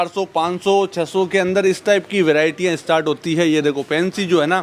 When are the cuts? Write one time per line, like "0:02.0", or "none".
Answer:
none